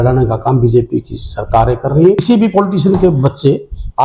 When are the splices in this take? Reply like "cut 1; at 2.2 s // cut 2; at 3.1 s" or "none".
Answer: cut 1; at 2.2 s